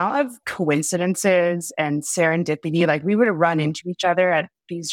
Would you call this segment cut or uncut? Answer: uncut